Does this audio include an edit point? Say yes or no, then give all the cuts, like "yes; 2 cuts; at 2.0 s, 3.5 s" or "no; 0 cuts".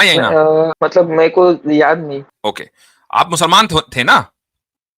yes; 2 cuts; at 0.7 s, 2.3 s